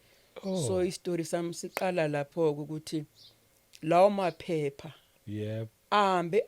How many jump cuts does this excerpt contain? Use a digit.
0